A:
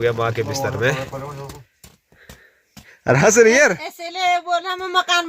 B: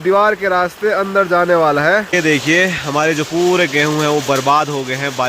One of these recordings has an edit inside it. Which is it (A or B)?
B